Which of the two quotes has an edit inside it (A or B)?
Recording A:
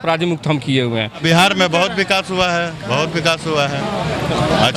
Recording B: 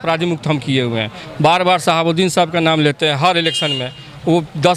A